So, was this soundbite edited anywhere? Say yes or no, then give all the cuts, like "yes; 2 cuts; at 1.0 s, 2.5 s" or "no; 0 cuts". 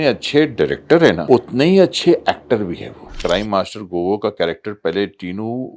yes; 2 cuts; at 1.2 s, 3.0 s